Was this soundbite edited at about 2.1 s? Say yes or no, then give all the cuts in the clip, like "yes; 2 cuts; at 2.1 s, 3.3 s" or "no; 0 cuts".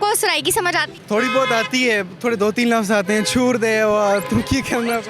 no; 1 cut; at 0.9 s